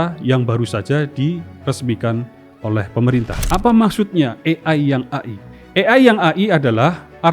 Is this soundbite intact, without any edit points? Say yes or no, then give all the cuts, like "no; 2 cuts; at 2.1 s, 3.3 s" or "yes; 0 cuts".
no; 1 cut; at 3.4 s